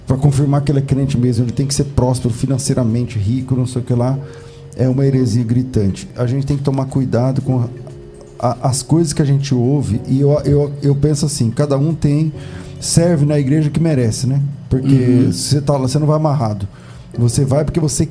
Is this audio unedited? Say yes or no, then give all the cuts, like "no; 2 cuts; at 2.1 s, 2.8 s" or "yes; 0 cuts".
yes; 0 cuts